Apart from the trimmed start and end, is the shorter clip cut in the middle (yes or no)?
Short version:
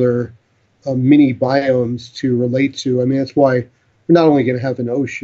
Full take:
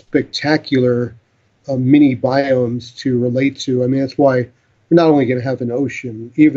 no